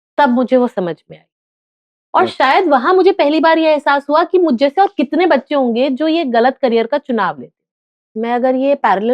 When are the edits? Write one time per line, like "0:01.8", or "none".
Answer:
0:08.1

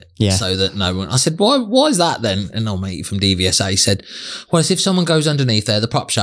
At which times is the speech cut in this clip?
none

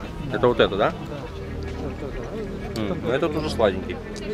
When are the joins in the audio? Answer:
none

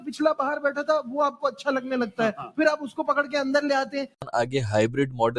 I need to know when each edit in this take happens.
0:04.2

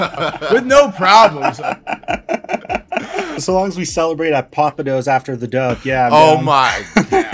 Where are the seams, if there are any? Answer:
0:03.4

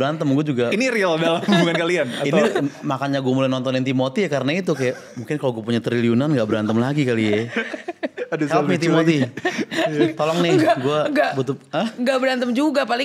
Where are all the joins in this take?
none

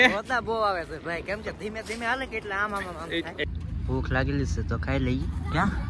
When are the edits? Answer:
0:03.4

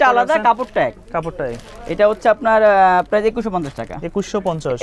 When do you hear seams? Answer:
none

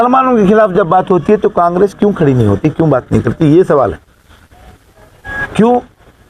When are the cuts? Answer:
none

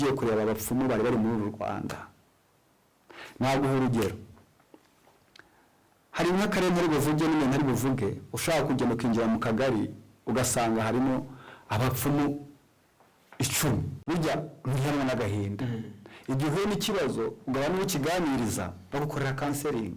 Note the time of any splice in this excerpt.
0:13.9

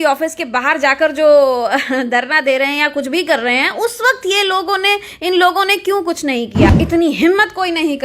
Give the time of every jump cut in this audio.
0:06.7

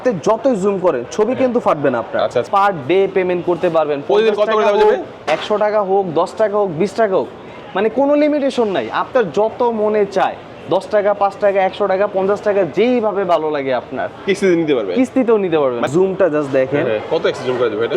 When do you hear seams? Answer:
0:02.5
0:15.9

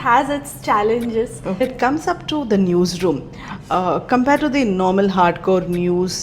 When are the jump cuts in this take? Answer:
0:01.6

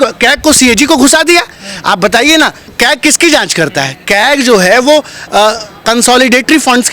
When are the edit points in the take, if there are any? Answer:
none

